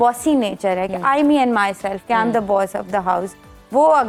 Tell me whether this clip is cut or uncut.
uncut